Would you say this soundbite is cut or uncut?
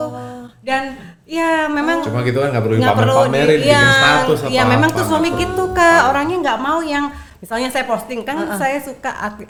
uncut